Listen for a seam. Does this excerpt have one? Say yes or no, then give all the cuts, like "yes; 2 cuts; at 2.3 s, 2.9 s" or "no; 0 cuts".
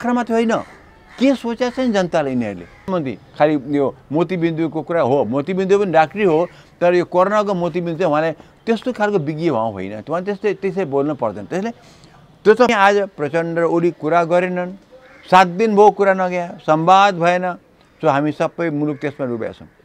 yes; 2 cuts; at 2.9 s, 12.7 s